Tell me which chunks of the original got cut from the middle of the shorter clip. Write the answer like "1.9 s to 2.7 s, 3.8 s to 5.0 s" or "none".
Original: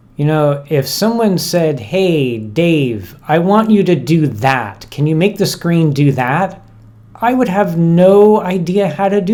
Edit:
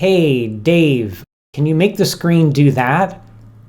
3.2 s to 4.7 s